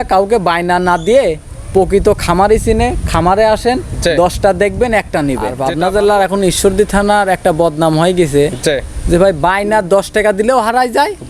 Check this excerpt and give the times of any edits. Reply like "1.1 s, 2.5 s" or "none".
5.6 s